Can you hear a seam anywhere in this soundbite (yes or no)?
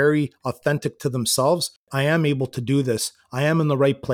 yes